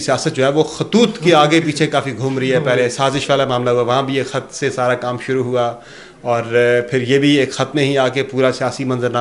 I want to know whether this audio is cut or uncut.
uncut